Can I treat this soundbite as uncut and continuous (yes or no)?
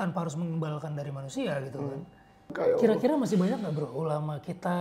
no